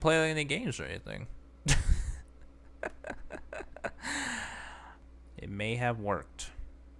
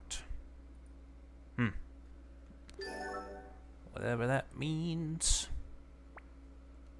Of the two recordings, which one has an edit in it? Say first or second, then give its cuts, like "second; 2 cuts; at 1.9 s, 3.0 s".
first; 1 cut; at 5.1 s